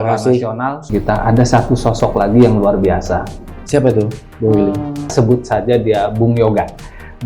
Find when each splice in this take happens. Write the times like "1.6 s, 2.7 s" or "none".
0.9 s, 5.1 s